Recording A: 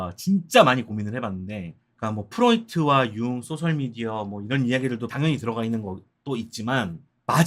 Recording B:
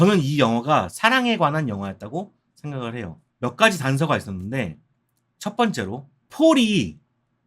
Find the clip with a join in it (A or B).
B